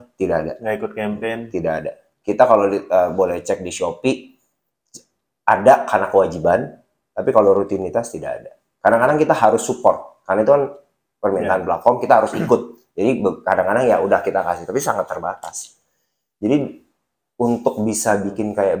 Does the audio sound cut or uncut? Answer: uncut